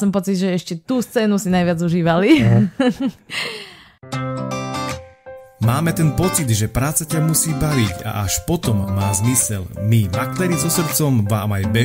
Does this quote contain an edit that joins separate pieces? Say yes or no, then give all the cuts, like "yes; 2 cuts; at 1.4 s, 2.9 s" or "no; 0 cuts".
yes; 1 cut; at 4.0 s